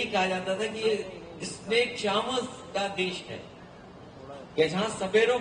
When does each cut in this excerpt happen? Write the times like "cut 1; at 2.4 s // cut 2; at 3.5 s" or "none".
none